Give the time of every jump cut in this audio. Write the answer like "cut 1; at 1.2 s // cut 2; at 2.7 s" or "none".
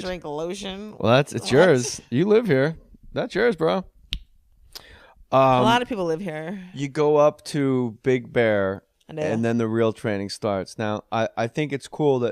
cut 1; at 8.3 s